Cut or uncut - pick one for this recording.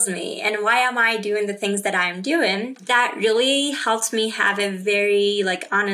cut